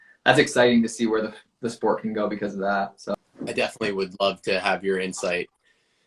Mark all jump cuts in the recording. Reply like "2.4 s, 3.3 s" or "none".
3.0 s